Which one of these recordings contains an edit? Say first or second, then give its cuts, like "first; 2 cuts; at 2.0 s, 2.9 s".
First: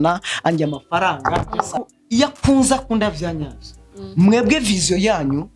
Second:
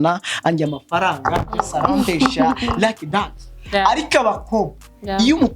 first; 1 cut; at 1.8 s